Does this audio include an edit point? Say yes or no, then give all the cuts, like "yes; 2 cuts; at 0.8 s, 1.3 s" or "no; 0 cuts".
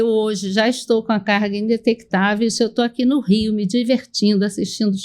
no; 0 cuts